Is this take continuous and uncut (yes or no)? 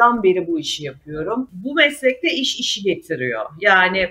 no